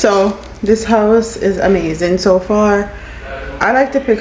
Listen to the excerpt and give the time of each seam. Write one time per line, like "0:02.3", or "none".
none